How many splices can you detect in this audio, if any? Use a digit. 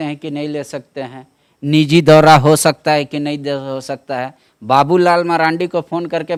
0